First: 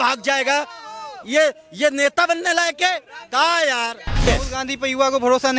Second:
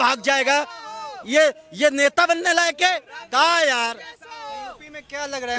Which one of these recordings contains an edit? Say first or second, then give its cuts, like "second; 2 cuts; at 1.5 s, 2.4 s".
first; 1 cut; at 4.3 s